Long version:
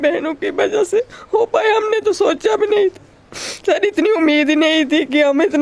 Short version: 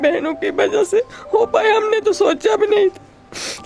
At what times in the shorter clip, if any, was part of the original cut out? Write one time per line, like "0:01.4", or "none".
none